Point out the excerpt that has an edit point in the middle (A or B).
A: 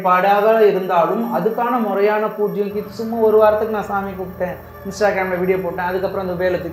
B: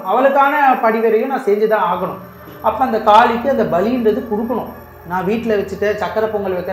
B